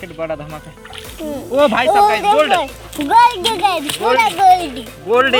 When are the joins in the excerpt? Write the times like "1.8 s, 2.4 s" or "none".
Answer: none